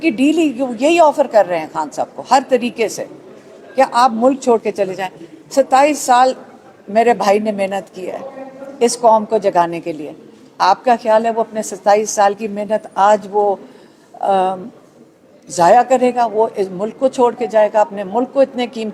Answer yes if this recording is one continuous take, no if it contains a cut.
yes